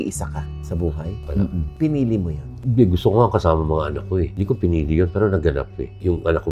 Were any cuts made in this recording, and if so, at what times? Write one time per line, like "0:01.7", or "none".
none